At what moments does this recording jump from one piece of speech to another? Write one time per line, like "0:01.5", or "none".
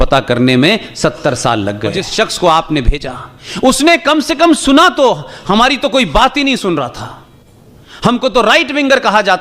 0:02.1

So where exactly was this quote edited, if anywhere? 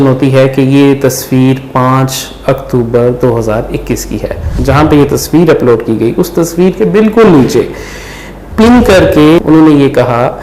0:04.6
0:09.4

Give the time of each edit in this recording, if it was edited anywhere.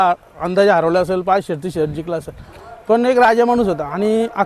none

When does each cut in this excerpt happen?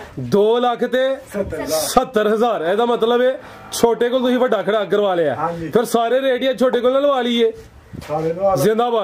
none

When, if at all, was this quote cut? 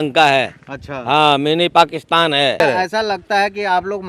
0:02.6

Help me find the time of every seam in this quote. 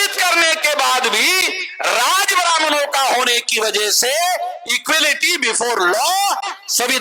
none

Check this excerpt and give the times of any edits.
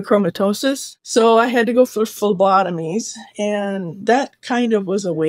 0:01.0

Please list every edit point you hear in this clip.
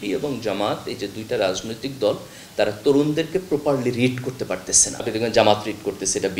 0:04.9

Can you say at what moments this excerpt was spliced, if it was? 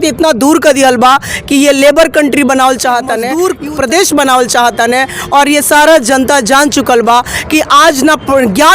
0:03.3

